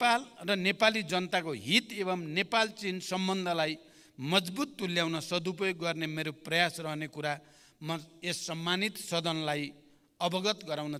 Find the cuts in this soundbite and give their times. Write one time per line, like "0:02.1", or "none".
none